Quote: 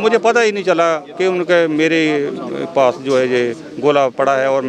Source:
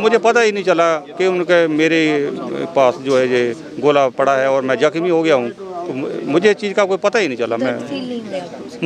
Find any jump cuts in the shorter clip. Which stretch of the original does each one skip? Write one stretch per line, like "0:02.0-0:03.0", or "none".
none